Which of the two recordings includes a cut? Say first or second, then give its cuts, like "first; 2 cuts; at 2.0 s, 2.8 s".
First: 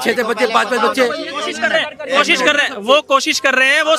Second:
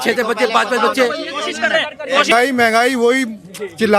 second; 1 cut; at 2.3 s